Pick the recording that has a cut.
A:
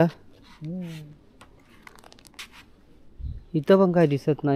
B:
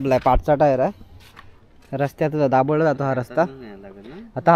A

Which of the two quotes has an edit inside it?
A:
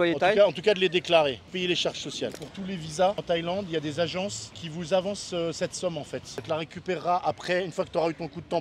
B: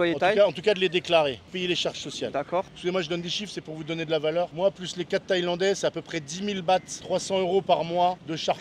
A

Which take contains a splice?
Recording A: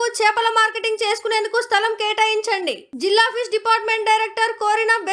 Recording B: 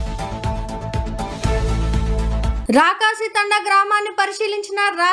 B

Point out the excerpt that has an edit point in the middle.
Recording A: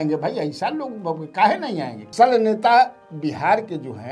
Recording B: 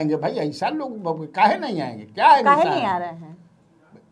A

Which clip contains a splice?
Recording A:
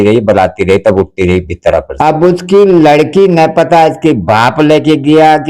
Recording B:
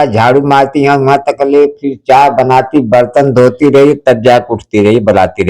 A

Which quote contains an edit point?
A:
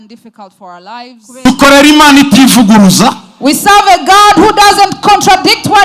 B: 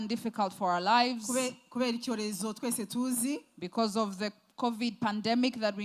A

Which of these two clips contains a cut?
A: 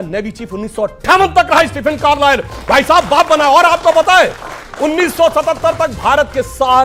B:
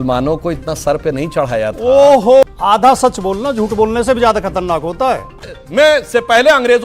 B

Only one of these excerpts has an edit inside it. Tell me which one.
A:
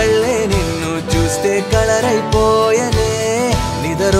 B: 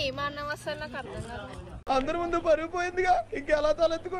B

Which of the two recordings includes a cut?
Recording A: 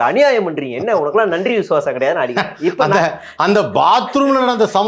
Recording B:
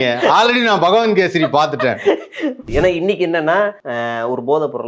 B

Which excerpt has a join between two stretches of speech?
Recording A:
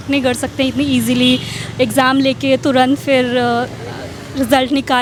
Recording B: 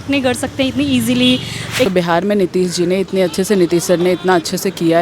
B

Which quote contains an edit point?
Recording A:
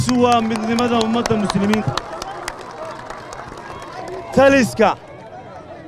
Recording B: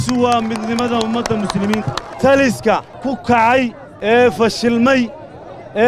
B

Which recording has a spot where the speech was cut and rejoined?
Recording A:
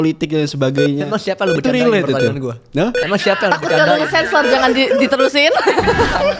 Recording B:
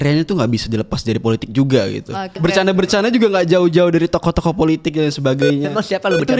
B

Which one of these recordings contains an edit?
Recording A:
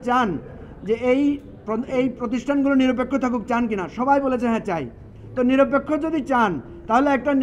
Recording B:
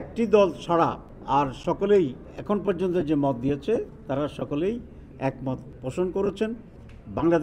B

